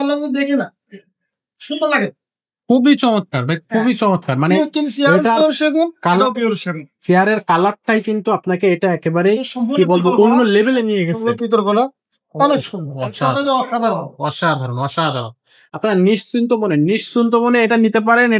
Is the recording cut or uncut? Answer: uncut